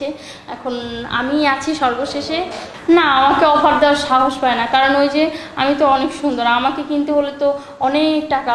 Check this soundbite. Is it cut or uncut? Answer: cut